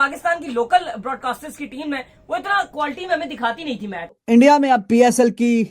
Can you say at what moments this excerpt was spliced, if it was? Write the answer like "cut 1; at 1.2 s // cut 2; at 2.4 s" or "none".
cut 1; at 4.1 s